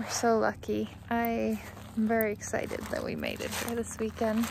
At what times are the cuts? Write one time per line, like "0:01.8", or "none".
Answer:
0:01.0
0:01.8